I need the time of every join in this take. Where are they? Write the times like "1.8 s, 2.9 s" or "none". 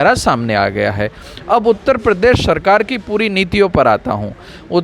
none